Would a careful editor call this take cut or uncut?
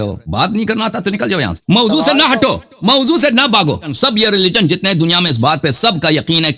cut